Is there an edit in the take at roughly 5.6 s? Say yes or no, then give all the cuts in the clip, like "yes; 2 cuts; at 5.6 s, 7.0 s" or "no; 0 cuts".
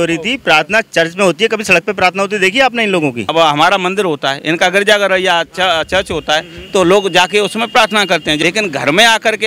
no; 2 cuts; at 3.3 s, 8.4 s